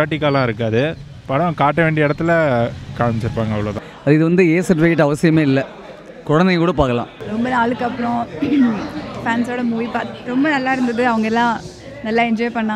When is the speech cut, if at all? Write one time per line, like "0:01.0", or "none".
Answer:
0:03.9
0:07.2

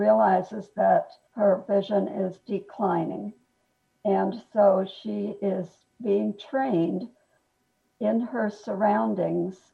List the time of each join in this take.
0:01.2

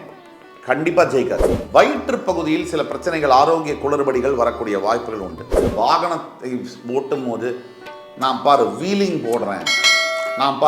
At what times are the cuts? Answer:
0:01.5
0:05.7

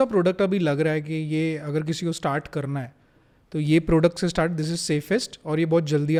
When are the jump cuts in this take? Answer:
none

